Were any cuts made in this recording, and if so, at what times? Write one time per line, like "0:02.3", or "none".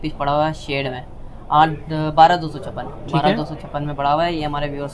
none